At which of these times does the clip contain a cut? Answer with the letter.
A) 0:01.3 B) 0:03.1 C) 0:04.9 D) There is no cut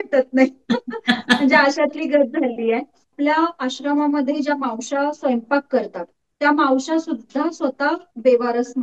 B